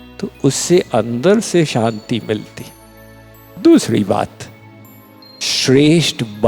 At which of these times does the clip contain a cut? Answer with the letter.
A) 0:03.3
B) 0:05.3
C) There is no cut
C